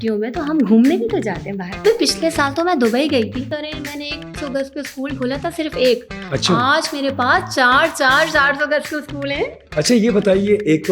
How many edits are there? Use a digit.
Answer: 3